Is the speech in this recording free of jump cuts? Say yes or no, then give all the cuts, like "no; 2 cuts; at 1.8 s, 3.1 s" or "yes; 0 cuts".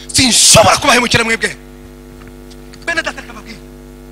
yes; 0 cuts